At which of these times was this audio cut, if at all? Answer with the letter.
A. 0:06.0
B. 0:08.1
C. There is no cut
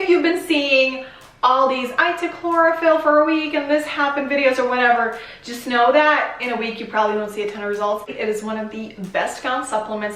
B